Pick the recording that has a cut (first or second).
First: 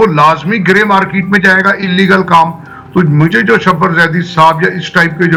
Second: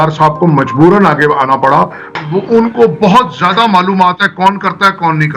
second